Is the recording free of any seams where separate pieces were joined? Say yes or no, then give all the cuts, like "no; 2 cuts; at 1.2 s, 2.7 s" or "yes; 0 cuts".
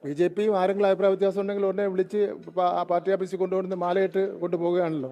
yes; 0 cuts